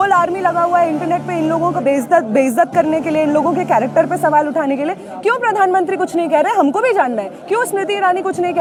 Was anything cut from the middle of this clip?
no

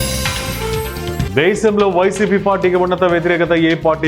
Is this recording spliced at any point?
yes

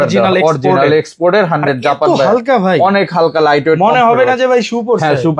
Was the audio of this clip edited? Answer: no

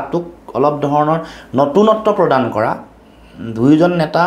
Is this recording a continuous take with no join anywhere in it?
yes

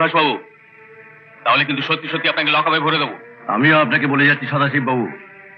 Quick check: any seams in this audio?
no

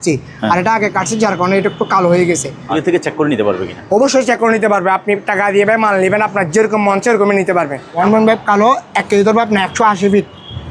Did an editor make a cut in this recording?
yes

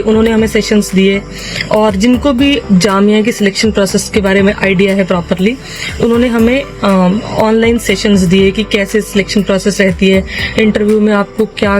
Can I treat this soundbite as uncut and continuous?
yes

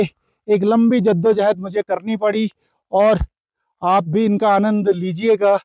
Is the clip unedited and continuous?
yes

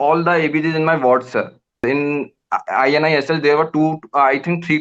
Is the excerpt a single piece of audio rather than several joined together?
no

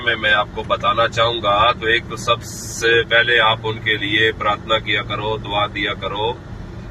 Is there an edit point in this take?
no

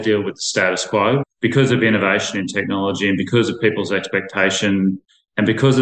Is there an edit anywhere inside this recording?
yes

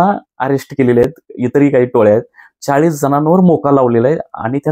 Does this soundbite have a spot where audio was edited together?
no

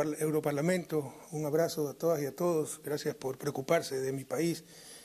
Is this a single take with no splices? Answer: yes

